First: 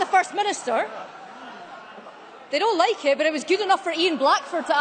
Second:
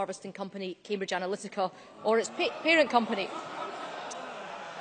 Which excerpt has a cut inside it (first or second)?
second